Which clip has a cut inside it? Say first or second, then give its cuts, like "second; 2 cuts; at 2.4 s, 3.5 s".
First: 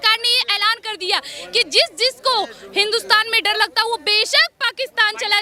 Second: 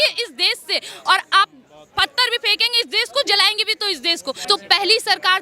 second; 1 cut; at 4.4 s